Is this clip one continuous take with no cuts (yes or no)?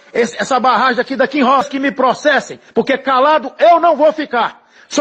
no